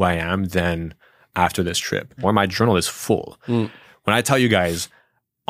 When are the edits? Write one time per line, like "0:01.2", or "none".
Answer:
0:02.2